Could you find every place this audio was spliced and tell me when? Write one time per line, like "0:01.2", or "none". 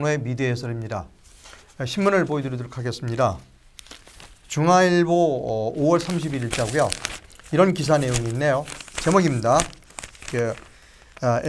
none